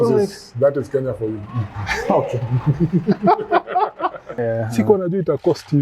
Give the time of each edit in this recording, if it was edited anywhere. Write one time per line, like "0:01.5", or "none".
0:04.4